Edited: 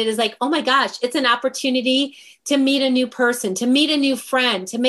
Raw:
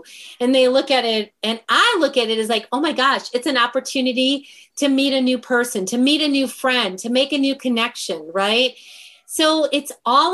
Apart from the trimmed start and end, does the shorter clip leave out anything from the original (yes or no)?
no